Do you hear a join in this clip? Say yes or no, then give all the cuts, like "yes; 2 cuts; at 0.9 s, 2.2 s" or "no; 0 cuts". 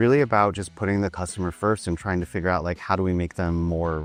no; 0 cuts